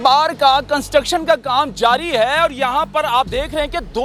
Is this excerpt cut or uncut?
uncut